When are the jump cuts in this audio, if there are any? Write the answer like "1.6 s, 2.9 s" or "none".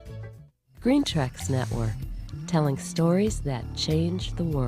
1.1 s